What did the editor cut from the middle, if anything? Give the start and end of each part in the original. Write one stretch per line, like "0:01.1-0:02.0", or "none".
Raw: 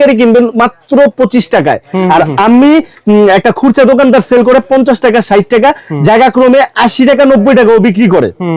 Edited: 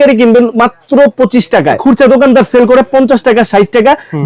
0:01.8-0:03.6